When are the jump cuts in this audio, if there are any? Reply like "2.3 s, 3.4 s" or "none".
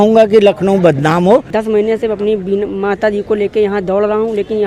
1.5 s